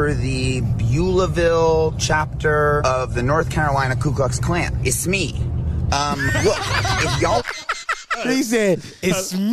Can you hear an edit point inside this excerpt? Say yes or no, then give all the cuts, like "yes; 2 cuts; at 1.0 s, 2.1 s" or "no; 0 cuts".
yes; 3 cuts; at 2.8 s, 4.8 s, 8.2 s